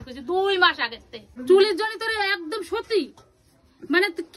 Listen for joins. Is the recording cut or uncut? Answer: cut